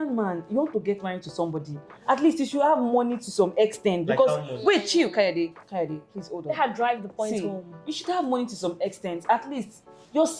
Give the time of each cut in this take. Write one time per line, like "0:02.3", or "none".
none